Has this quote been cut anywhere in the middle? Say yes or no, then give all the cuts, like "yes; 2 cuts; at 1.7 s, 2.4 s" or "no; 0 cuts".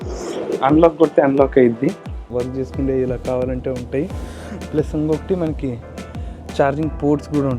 yes; 1 cut; at 2.2 s